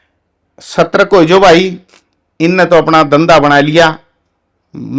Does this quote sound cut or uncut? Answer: uncut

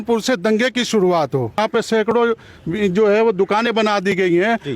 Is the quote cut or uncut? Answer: cut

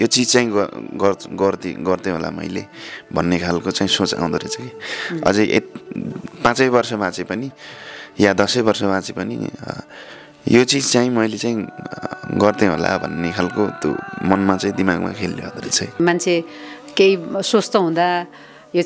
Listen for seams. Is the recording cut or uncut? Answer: cut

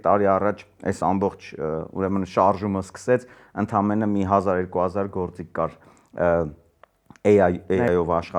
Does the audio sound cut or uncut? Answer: uncut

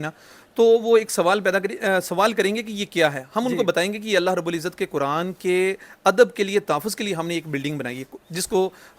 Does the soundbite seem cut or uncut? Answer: uncut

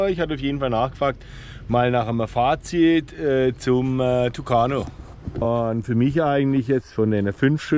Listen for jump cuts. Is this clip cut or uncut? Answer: cut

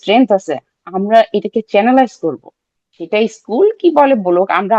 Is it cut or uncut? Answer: uncut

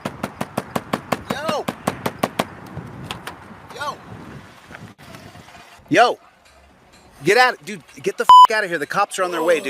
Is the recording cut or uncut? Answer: cut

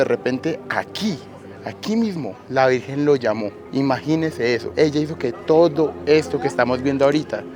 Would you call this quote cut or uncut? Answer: cut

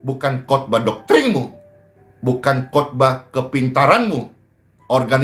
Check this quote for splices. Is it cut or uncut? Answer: uncut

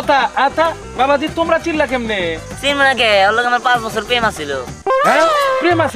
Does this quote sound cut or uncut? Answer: uncut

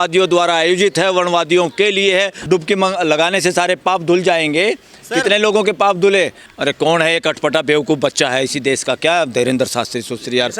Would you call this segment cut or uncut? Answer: cut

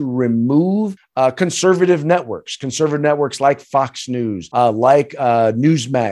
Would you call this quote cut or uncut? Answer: cut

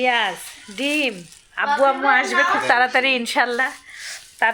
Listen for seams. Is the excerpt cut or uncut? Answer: uncut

